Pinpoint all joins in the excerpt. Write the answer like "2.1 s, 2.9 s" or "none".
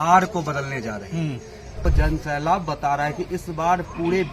1.8 s